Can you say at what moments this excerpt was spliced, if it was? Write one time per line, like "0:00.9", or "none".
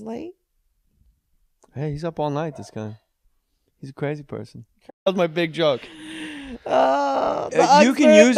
none